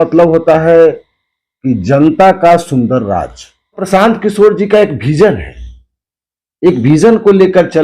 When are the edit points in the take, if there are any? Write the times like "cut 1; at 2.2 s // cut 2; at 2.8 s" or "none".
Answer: cut 1; at 3.8 s